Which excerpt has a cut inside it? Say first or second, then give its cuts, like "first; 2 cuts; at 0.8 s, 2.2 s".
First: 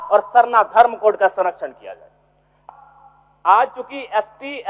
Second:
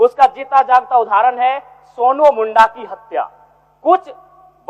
first; 1 cut; at 2.5 s